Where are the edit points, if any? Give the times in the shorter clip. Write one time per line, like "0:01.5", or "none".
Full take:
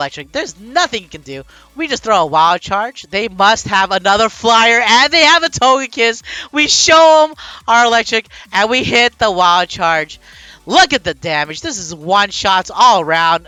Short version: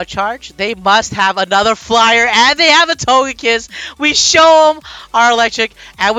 none